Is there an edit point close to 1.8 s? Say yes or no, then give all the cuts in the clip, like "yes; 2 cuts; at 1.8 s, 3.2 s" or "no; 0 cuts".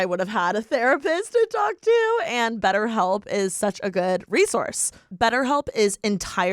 no; 1 cut; at 5.1 s